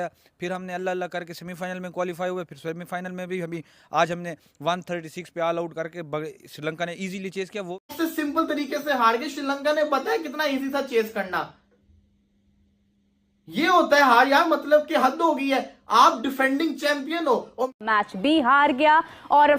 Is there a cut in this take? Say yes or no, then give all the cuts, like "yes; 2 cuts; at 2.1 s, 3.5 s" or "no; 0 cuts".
yes; 2 cuts; at 7.9 s, 18.0 s